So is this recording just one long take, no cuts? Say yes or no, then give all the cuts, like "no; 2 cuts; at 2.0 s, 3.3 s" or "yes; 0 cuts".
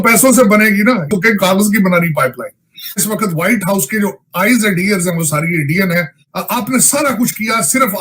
no; 3 cuts; at 1.1 s, 3.0 s, 6.3 s